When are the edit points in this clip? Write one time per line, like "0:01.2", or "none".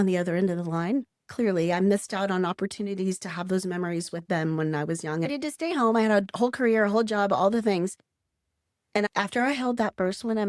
0:01.2
0:05.3

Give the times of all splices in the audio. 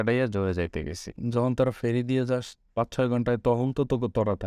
0:01.1

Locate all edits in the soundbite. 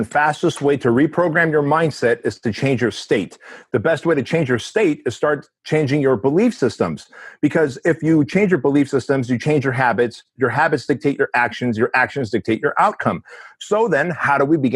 none

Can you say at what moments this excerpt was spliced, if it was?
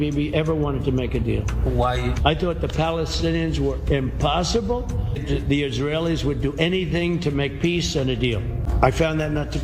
0:05.2
0:08.7

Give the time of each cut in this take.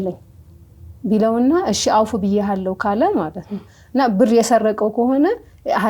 none

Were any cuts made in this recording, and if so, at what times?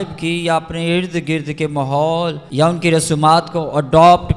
0:02.4

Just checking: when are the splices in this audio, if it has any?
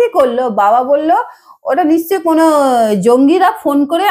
none

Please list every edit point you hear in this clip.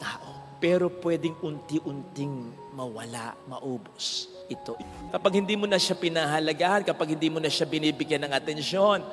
0:04.9

